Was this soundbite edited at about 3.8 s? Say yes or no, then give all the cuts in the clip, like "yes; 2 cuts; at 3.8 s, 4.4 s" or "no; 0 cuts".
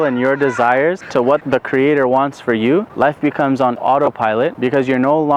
yes; 4 cuts; at 1.3 s, 2.9 s, 3.8 s, 4.5 s